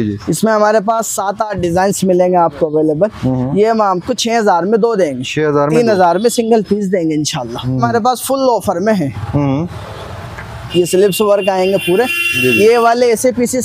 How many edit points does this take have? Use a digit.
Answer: 1